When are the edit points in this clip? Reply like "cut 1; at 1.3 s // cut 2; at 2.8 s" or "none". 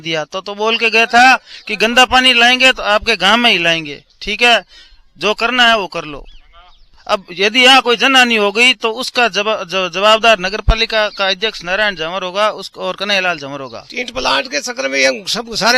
cut 1; at 13.8 s